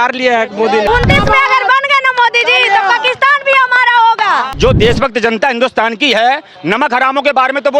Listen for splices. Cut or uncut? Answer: cut